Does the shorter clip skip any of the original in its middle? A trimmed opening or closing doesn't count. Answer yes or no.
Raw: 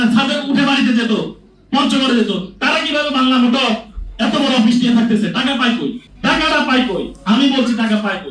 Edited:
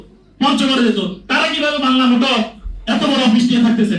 no